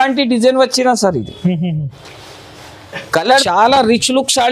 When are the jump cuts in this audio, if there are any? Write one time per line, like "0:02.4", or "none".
0:03.2